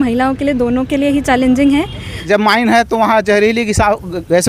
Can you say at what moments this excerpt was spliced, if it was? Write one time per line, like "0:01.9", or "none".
0:02.2